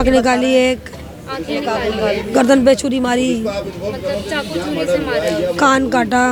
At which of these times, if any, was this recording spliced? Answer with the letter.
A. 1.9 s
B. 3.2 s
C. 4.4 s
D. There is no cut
D